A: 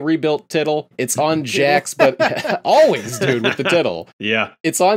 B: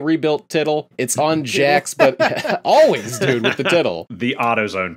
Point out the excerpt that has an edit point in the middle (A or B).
B